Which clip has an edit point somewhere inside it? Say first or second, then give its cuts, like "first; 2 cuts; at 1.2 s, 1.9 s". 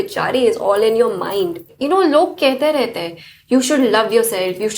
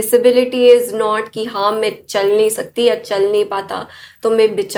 first; 1 cut; at 1.7 s